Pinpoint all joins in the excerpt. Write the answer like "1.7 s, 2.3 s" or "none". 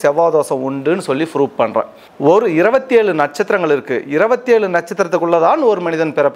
2.0 s